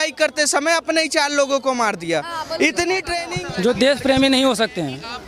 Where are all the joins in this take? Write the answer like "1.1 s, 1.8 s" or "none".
3.3 s